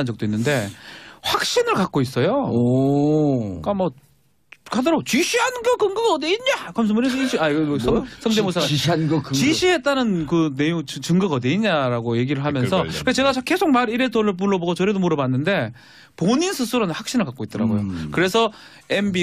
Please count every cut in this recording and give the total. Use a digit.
1